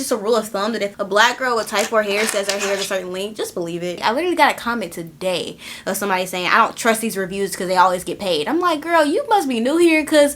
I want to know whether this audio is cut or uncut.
cut